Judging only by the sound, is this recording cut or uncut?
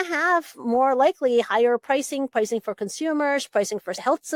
uncut